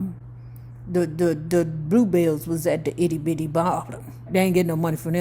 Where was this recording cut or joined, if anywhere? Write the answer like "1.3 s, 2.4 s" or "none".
4.2 s